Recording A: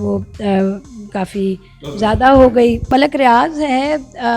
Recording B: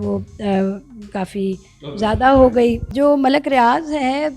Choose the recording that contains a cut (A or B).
A